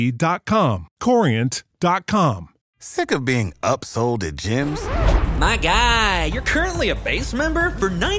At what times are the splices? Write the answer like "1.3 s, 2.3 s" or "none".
2.8 s